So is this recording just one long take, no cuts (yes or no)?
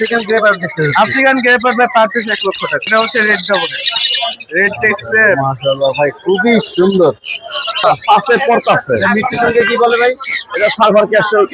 no